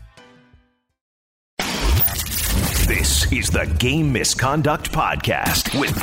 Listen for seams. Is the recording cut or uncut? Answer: cut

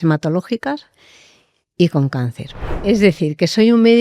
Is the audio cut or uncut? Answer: cut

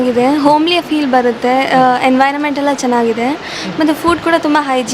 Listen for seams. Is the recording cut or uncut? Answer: uncut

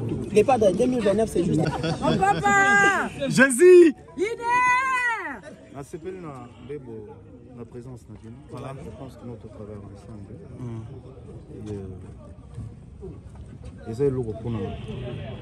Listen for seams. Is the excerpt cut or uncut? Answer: cut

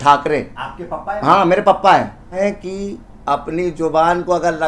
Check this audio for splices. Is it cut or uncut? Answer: cut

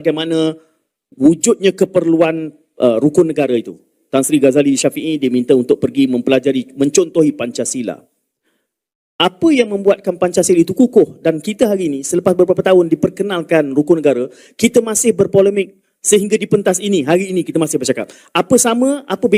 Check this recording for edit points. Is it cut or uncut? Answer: uncut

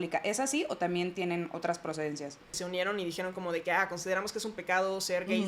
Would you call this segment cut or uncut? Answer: cut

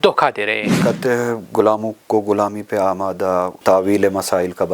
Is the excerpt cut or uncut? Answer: cut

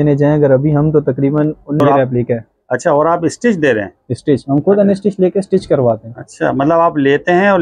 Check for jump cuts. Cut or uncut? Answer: cut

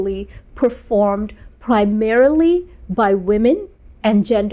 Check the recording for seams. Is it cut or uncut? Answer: uncut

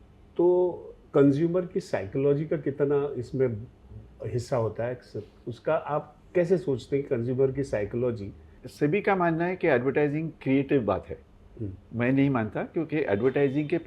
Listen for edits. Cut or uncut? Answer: cut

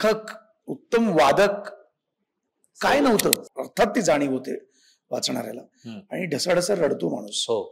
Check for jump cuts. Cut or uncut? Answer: cut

